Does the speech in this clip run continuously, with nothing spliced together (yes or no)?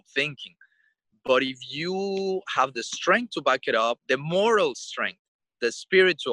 no